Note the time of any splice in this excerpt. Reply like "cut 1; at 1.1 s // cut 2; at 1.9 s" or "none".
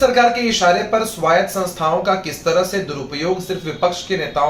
none